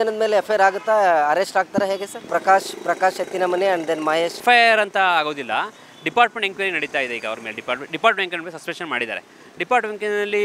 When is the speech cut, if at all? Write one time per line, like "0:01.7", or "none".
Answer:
0:02.1
0:04.4